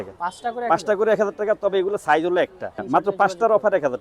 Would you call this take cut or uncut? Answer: cut